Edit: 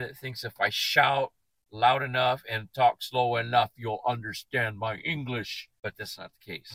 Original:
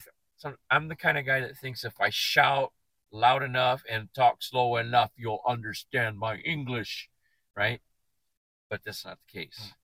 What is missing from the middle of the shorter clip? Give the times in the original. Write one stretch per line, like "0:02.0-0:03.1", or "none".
0:07.0-0:08.5